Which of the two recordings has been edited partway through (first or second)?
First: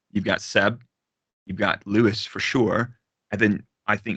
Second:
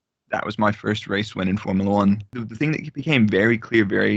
second